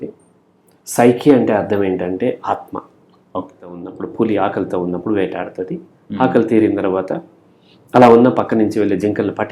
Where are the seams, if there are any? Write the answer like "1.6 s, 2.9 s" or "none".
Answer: 4.0 s